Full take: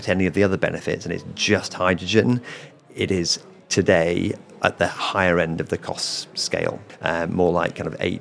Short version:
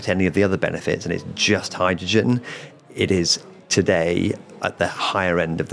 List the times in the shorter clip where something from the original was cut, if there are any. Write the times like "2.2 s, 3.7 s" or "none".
none